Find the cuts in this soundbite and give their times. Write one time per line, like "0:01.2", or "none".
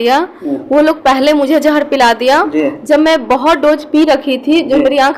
none